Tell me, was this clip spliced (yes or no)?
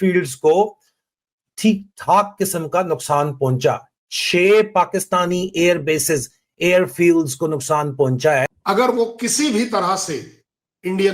yes